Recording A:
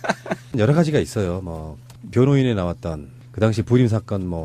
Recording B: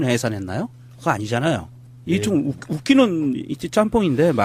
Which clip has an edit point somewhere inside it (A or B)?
A